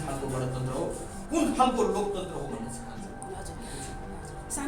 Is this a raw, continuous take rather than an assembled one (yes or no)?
yes